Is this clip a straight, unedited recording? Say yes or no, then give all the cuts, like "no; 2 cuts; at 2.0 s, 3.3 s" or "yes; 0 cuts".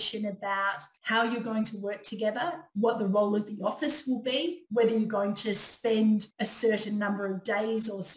no; 2 cuts; at 0.9 s, 6.4 s